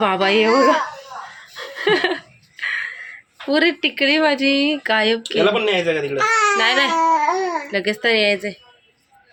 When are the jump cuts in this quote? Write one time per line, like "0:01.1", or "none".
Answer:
none